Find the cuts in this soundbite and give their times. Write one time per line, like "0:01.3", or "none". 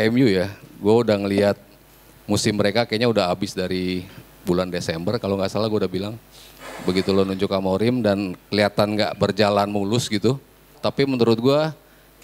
0:10.8